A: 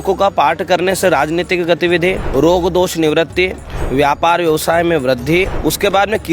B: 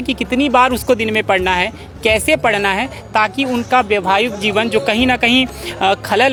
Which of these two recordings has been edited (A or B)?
A